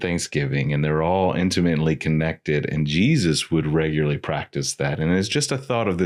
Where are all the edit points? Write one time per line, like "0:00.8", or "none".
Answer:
none